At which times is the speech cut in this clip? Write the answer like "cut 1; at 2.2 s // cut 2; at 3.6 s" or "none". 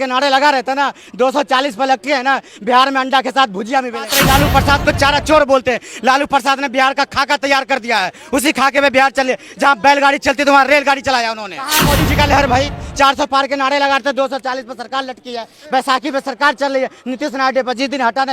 cut 1; at 4.1 s // cut 2; at 11.8 s